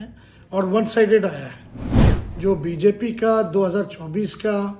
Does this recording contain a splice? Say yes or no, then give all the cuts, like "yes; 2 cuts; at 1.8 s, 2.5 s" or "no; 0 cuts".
no; 0 cuts